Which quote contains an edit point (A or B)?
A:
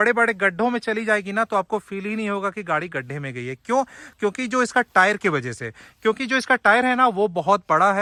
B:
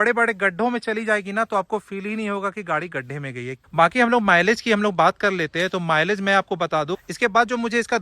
B